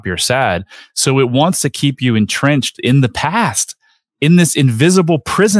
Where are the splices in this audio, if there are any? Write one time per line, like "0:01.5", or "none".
0:02.7